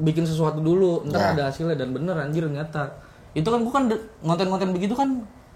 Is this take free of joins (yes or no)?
yes